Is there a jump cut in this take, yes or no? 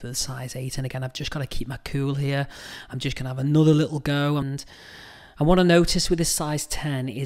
yes